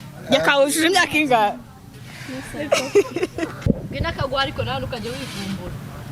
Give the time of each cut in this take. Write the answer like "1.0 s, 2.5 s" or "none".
3.7 s

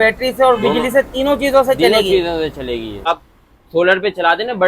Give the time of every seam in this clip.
3.1 s

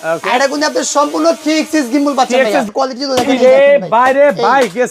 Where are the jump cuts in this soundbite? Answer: 2.7 s

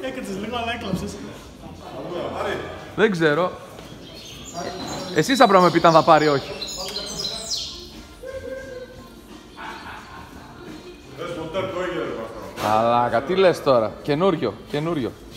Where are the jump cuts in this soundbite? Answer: none

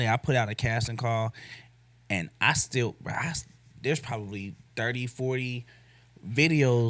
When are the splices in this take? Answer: none

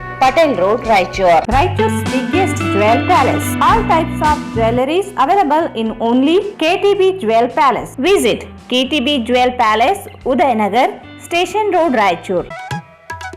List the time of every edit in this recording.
1.4 s

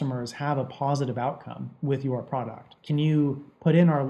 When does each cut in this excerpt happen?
2.7 s

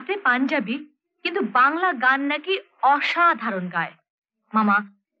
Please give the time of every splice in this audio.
none

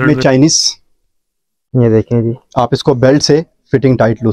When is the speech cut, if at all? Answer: none

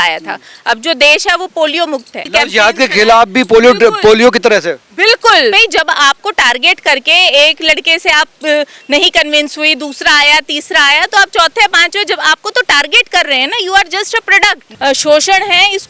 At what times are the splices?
2.2 s, 5.6 s, 14.7 s

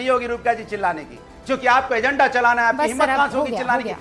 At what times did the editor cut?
none

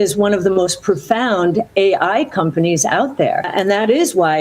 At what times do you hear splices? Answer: 3.5 s

